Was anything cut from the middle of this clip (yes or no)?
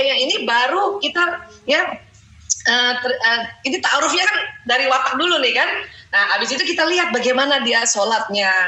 no